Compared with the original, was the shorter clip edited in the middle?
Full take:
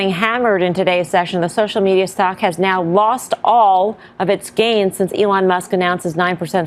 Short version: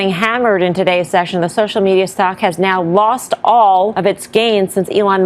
yes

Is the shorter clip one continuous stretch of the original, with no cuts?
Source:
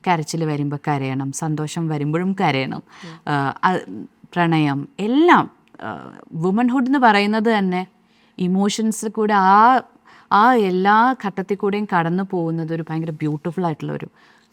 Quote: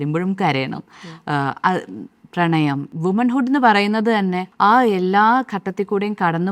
no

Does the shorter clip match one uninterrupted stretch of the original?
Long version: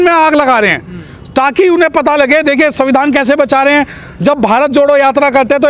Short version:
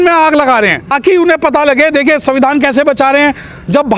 no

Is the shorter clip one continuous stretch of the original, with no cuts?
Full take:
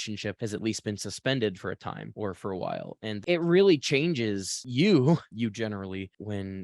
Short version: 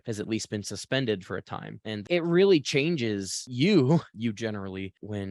no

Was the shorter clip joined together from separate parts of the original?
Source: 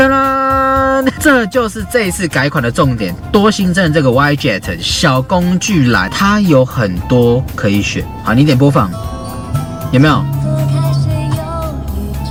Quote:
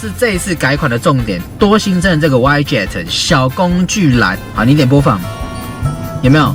yes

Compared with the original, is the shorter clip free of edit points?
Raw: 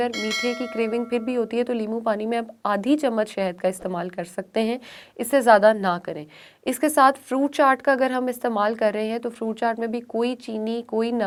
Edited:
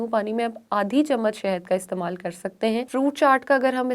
no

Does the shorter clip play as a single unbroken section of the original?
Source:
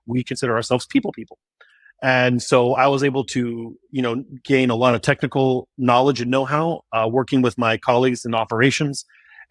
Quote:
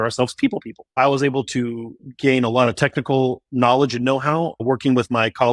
no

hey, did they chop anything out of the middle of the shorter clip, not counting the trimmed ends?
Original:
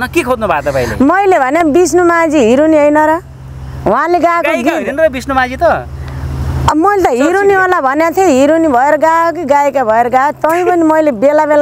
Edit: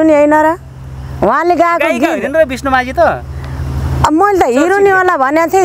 no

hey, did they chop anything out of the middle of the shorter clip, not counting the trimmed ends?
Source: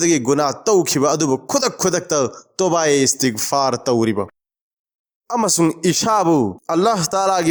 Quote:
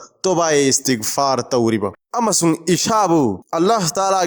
yes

